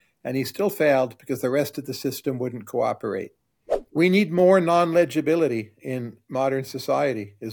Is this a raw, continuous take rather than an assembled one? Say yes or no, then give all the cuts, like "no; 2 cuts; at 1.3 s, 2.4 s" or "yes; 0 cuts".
no; 1 cut; at 3.9 s